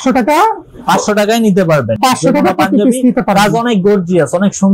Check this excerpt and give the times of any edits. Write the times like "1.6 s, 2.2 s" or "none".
none